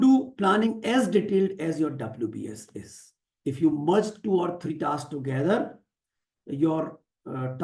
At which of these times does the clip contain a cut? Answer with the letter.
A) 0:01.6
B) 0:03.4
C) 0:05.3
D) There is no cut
D